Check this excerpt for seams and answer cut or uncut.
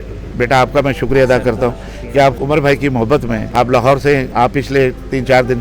cut